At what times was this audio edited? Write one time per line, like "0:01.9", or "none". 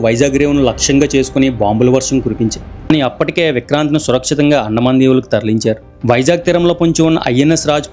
0:02.9
0:05.9